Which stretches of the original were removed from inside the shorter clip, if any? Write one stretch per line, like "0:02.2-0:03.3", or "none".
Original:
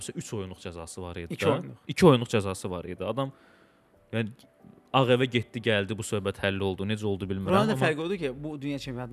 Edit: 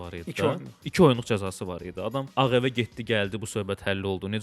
0:03.3-0:04.8